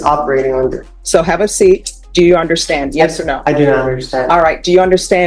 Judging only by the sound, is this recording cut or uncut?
cut